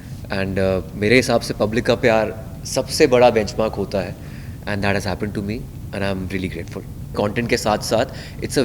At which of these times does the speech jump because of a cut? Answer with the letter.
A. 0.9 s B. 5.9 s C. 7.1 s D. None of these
C